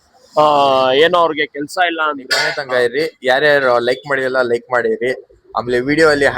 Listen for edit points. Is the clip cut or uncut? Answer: cut